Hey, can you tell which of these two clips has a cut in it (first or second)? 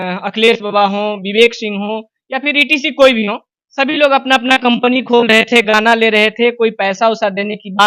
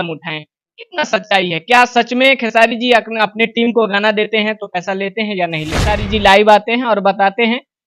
second